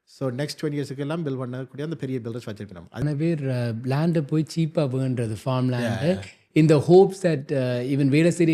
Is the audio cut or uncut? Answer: cut